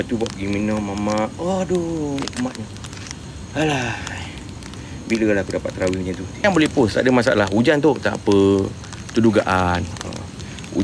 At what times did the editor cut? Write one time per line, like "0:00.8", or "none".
0:06.4